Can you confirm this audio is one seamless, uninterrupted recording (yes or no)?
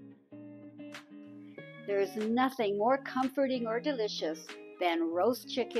no